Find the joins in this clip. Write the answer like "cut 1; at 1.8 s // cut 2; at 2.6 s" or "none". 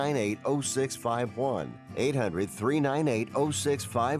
cut 1; at 1.8 s

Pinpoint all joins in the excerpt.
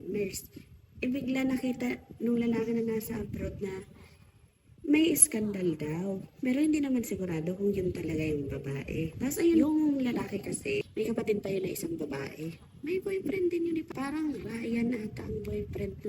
cut 1; at 9.6 s // cut 2; at 10.9 s // cut 3; at 13.9 s

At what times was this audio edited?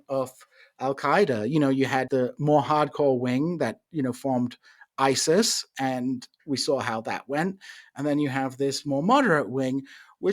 cut 1; at 2.1 s

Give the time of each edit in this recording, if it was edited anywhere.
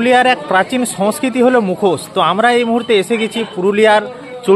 none

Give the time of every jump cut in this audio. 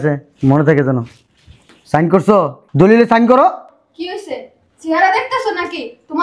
cut 1; at 2.6 s

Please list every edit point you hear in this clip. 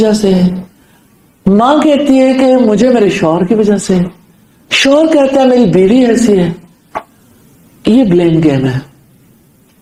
none

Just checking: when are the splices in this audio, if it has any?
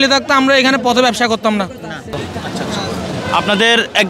cut 1; at 2.2 s

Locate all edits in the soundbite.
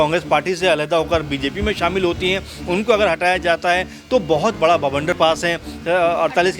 cut 1; at 5.2 s

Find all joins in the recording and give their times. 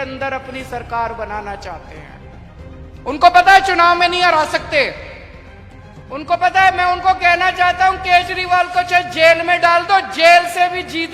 none

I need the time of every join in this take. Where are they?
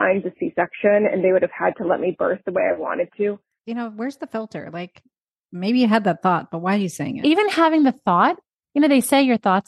cut 1; at 3.5 s // cut 2; at 8.5 s

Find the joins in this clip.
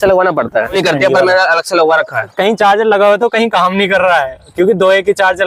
cut 1; at 0.7 s // cut 2; at 2.3 s

